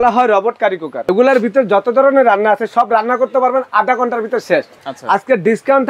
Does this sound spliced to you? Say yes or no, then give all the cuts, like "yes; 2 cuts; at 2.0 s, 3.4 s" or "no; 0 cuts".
yes; 2 cuts; at 0.9 s, 4.8 s